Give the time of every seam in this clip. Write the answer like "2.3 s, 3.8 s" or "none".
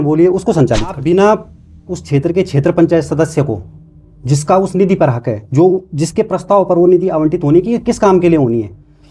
1.0 s